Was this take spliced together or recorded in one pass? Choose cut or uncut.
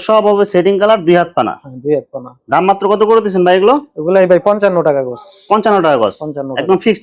uncut